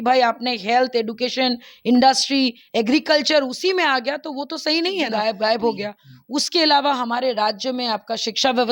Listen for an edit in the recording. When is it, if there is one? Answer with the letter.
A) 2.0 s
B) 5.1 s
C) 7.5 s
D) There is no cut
B